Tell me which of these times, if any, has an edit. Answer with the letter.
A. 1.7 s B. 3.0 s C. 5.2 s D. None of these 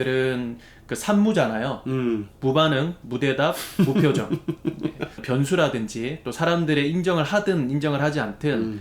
C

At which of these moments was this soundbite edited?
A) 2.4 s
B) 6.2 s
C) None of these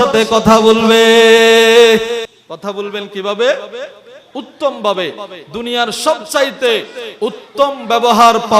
A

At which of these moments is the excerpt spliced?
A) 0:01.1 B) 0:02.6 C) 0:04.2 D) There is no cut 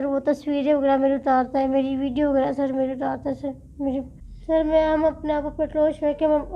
C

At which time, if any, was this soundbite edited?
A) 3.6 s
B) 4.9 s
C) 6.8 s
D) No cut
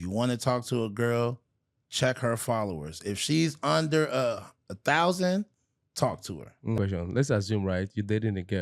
C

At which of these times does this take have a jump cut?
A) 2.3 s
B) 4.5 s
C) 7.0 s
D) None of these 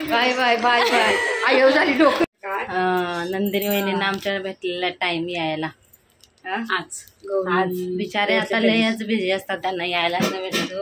A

